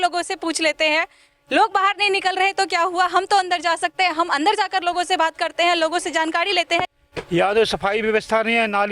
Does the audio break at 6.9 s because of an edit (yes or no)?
yes